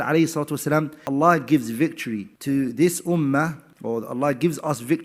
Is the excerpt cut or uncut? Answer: cut